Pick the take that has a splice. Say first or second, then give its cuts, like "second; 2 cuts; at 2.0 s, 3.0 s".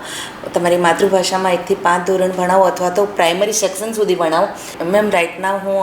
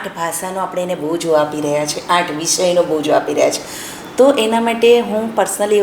first; 1 cut; at 4.7 s